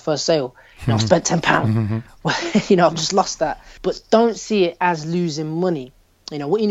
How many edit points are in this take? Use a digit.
1